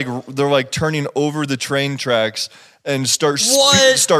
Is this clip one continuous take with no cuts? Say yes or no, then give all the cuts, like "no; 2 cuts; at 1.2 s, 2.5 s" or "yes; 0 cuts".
yes; 0 cuts